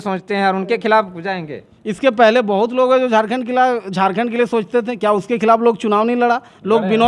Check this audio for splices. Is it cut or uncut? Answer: uncut